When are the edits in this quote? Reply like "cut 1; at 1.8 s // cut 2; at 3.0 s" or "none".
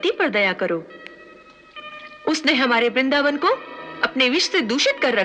none